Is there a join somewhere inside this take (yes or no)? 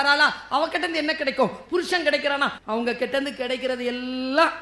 yes